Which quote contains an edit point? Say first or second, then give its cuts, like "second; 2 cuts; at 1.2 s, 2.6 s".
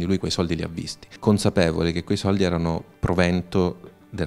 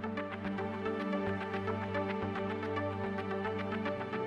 first; 1 cut; at 1.1 s